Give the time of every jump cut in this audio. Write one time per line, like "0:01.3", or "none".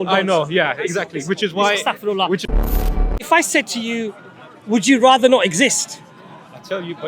0:02.6